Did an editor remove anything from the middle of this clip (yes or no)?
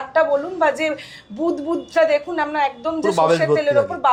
no